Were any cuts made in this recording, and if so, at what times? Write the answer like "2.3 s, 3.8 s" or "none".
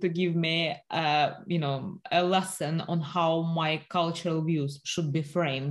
none